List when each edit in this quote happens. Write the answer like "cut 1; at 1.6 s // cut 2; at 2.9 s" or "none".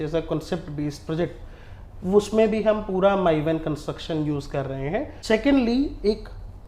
cut 1; at 5.2 s